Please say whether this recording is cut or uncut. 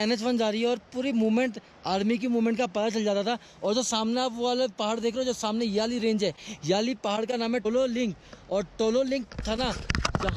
uncut